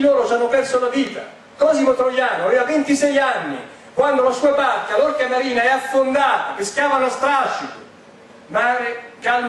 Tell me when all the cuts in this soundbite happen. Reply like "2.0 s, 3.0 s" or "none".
4.4 s